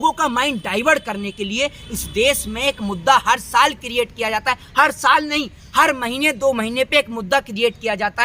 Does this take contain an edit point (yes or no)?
no